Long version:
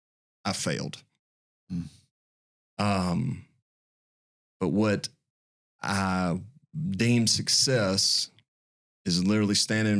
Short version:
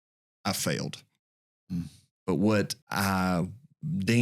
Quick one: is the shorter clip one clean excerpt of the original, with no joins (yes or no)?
no